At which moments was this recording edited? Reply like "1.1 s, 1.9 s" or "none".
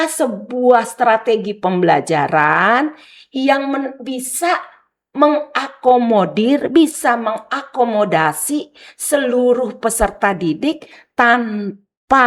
none